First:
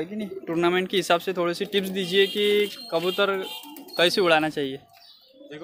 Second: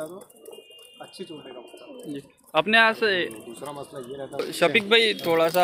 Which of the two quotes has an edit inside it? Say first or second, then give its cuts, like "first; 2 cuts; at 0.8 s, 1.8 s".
second; 1 cut; at 4.4 s